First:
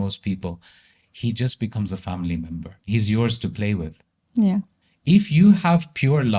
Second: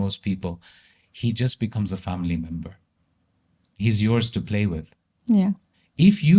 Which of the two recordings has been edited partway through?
first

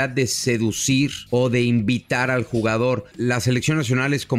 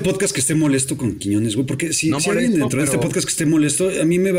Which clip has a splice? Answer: first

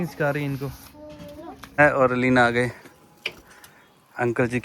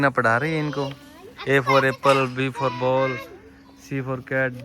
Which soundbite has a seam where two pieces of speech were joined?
first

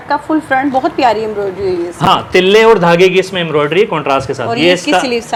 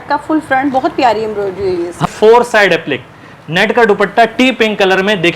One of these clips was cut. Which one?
second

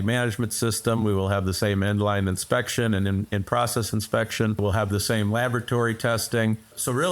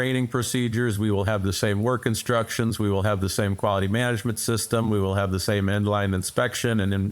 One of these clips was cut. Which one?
first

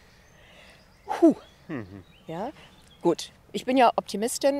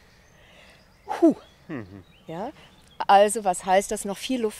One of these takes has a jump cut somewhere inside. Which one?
second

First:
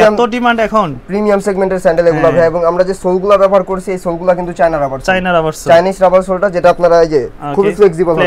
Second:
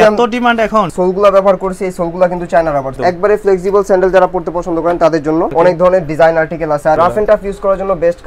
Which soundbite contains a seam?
second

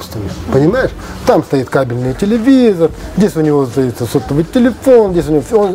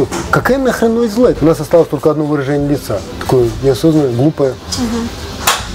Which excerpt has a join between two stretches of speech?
second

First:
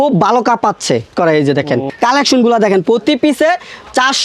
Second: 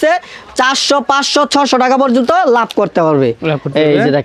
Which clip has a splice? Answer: first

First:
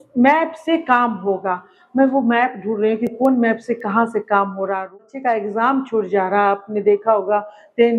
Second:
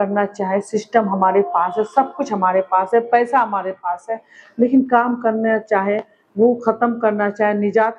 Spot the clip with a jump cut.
first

